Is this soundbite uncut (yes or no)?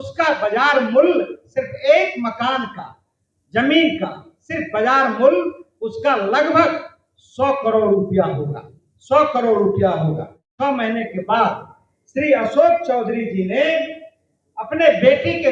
no